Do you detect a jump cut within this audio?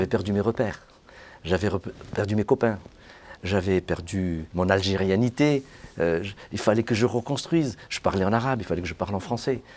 yes; 1 cut; at 4.4 s

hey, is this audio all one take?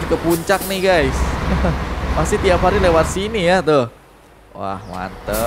yes; 0 cuts

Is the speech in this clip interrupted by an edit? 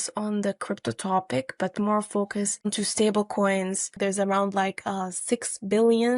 yes; 2 cuts; at 2.5 s, 3.9 s

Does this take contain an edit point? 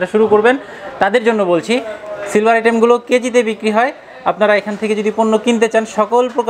no; 0 cuts

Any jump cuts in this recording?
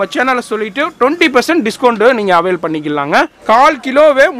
yes; 1 cut; at 3.4 s

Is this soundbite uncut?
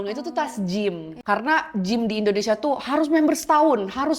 no; 1 cut; at 1.1 s

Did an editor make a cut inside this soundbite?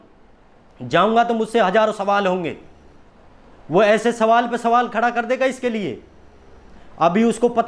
no; 0 cuts

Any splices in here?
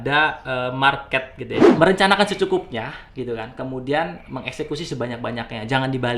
yes; 1 cut; at 1.6 s

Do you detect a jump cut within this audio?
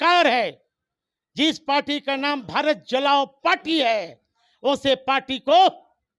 no; 0 cuts

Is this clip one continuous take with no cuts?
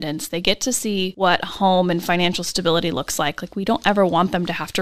no; 1 cut; at 1.1 s

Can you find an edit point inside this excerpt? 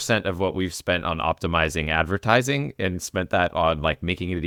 no; 0 cuts

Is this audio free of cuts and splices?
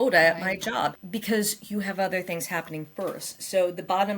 no; 1 cut; at 1.0 s

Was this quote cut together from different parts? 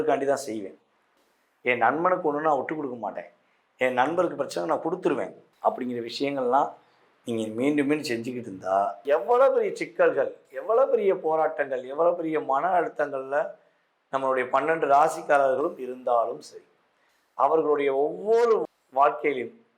yes; 1 cut; at 9.0 s

